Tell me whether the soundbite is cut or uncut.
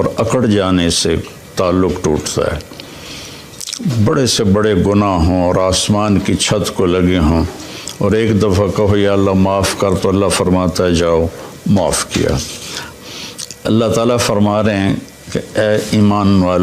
cut